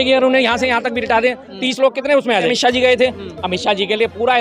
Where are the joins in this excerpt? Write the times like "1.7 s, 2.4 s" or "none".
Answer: 2.5 s